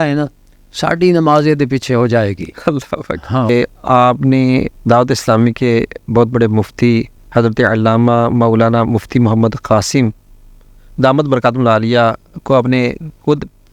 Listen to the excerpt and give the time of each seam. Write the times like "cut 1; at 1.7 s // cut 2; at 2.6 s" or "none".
cut 1; at 3.5 s // cut 2; at 4.7 s // cut 3; at 7.2 s